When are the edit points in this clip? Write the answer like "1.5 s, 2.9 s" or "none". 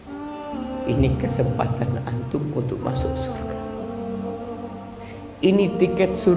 none